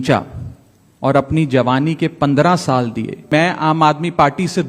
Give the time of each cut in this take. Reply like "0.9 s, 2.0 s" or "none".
3.3 s